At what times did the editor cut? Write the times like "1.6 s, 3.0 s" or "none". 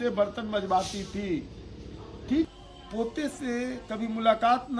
2.5 s